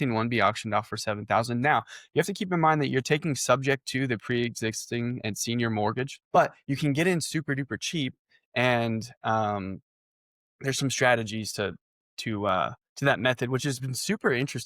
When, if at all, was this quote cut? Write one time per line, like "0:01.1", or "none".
0:06.2